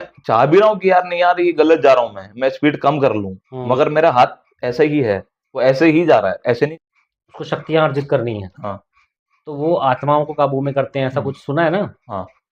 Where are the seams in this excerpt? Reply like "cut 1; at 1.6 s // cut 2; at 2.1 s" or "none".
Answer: cut 1; at 6.7 s